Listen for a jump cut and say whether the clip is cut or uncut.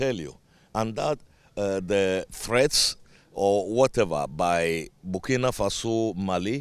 uncut